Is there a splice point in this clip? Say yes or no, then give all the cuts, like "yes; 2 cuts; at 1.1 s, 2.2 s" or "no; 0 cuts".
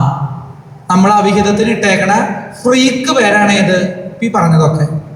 no; 0 cuts